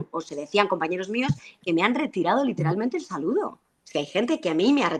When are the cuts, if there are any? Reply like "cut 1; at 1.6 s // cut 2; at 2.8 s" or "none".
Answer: none